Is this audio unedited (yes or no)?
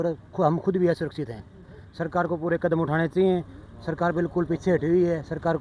yes